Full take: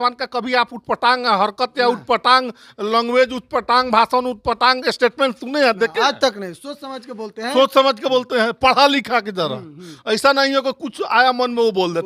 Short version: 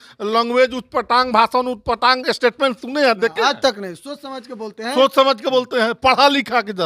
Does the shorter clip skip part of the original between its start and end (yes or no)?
no